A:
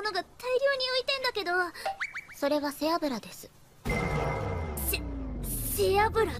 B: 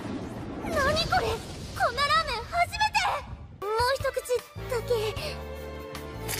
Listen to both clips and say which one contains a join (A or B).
A